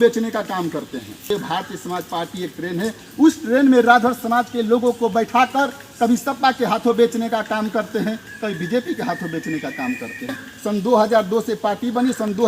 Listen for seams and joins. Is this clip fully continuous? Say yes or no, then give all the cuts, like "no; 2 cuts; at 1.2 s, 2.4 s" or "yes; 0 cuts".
no; 2 cuts; at 1.2 s, 10.5 s